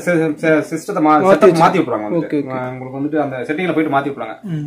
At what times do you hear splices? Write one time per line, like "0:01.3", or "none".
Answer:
none